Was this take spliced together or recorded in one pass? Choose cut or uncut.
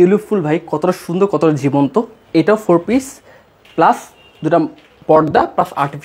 uncut